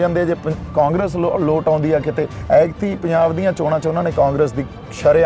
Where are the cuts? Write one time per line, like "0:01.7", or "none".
none